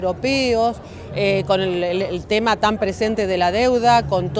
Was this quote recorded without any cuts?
no; 1 cut; at 2.7 s

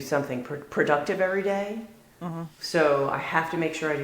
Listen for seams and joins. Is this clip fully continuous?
yes; 0 cuts

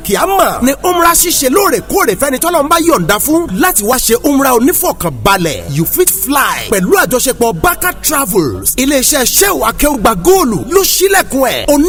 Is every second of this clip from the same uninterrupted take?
yes; 0 cuts

